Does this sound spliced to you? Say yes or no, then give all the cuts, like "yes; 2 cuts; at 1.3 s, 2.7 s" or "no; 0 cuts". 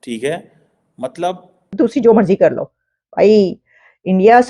yes; 1 cut; at 1.6 s